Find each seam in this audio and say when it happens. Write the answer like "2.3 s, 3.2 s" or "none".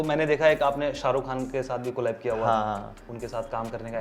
3.1 s